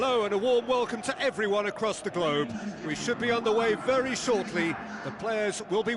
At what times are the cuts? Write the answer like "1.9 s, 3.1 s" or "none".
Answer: none